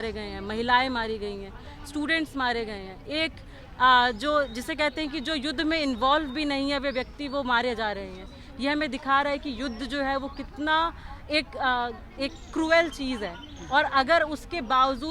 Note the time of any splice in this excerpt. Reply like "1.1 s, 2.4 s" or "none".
none